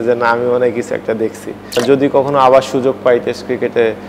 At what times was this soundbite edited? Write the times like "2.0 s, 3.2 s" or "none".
1.8 s

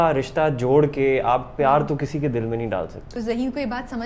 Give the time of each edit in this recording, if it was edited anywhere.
3.0 s

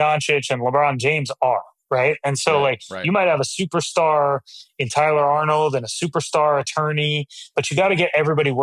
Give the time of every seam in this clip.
none

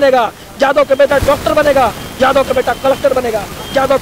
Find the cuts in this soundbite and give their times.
none

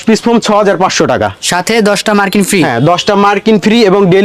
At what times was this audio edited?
none

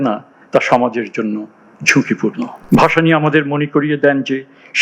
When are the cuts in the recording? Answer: 2.5 s

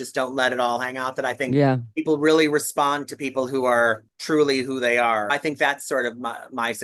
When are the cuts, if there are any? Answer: 4.1 s, 5.3 s

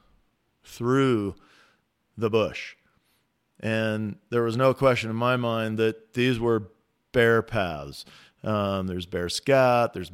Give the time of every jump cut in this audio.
none

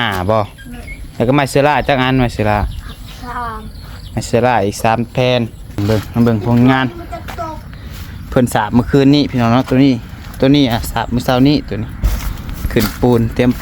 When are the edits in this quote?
5.8 s

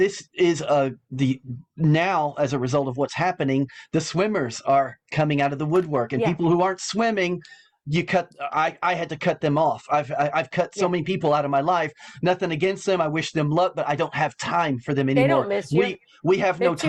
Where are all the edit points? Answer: none

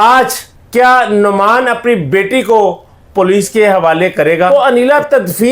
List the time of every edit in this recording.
4.5 s

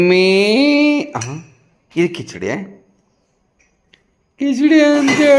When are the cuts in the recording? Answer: none

